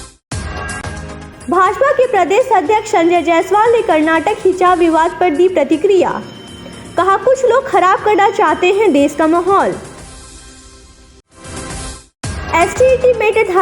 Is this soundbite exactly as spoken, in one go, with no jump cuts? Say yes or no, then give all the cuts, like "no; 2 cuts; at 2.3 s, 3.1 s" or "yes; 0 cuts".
yes; 0 cuts